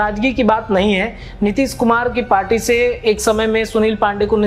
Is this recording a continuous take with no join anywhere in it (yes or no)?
yes